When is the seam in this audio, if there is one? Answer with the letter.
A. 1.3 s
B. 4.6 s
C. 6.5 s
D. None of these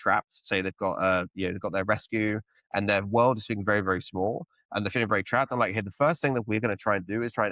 D